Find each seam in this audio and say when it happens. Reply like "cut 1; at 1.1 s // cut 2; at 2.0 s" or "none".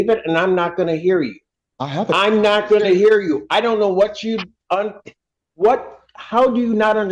none